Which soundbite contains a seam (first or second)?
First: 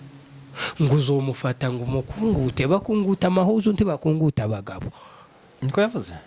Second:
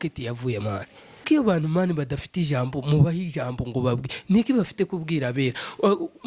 second